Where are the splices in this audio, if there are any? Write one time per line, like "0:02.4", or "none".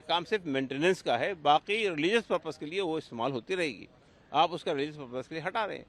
none